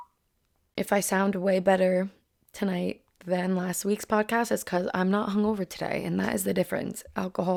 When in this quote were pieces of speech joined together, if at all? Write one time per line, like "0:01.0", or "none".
none